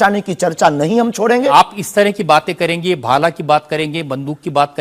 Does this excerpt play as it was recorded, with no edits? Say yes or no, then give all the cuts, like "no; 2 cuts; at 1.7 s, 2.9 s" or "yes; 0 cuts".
no; 1 cut; at 1.5 s